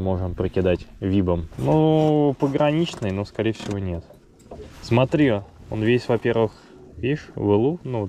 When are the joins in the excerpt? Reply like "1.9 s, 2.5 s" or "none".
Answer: none